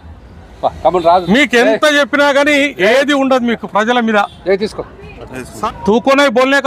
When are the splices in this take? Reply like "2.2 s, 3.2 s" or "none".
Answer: 5.6 s